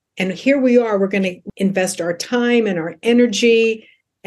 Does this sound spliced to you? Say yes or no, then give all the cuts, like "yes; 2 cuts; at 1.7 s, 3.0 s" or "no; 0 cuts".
yes; 1 cut; at 1.4 s